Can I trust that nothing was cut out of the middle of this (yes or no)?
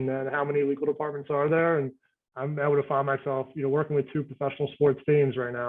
yes